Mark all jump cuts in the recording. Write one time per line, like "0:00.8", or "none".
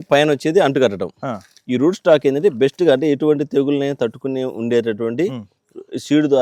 none